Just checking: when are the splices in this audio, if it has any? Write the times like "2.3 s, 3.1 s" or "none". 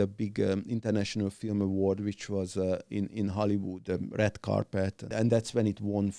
3.8 s, 5.1 s

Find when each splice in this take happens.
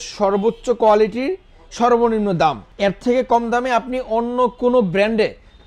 none

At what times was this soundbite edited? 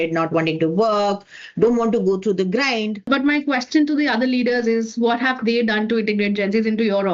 3.1 s

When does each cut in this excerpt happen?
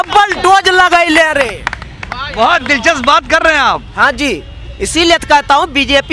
none

